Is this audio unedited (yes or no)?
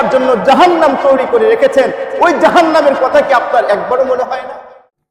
yes